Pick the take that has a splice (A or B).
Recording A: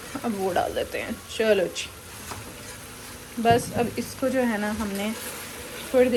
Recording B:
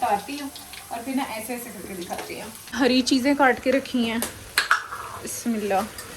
B